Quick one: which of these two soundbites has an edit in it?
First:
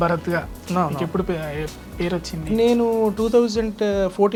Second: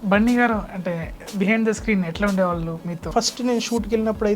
second; 1 cut; at 3.1 s

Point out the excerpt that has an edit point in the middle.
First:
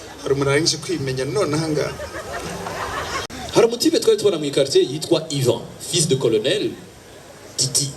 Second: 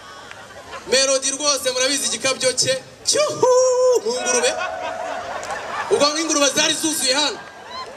first; 1 cut; at 3.2 s

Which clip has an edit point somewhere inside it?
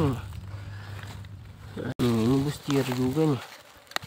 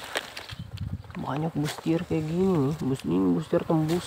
first; 1 cut; at 2.0 s

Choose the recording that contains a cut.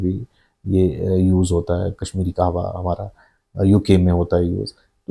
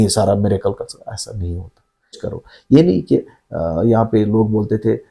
second; 1 cut; at 2.3 s

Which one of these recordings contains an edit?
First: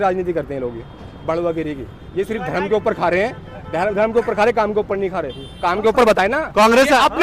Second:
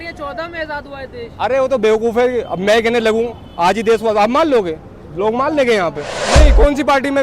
second; 1 cut; at 6.2 s

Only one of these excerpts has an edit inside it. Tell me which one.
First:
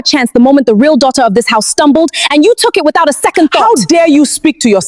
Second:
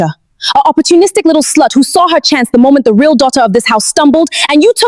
first; 1 cut; at 3.6 s

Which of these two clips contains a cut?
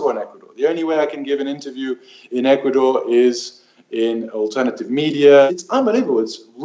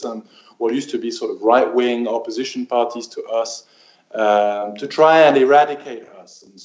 first; 1 cut; at 5.5 s

